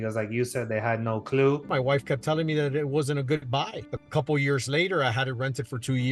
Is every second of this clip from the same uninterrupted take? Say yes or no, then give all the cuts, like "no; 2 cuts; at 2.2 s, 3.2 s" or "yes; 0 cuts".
no; 2 cuts; at 1.7 s, 3.8 s